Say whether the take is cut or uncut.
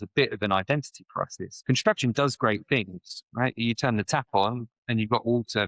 cut